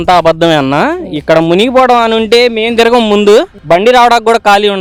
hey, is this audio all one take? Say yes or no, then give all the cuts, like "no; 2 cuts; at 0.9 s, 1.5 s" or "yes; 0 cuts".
yes; 0 cuts